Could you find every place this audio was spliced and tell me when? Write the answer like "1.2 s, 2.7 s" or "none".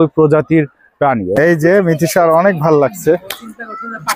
1.3 s